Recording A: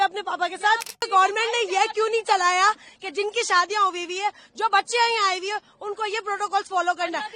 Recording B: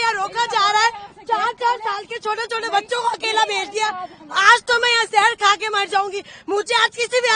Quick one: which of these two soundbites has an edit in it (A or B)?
A